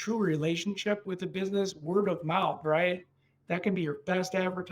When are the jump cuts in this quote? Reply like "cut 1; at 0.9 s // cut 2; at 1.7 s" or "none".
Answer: cut 1; at 1.0 s